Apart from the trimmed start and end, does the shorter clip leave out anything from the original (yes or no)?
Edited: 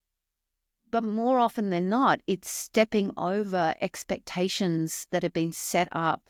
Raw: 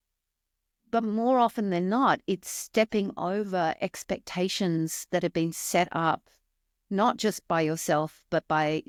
no